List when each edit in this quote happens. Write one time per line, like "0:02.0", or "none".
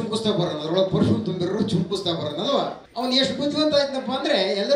0:02.8